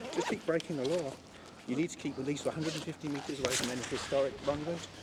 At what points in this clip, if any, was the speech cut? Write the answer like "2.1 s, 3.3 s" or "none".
none